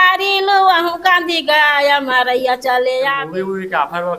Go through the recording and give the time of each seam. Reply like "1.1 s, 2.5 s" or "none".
3.2 s